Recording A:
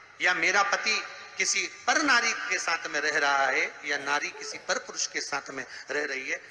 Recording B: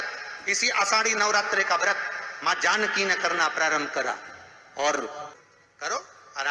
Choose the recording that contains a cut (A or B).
B